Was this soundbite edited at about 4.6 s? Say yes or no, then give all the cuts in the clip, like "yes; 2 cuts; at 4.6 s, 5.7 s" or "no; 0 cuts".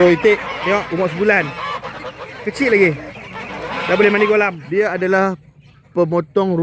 yes; 1 cut; at 4.6 s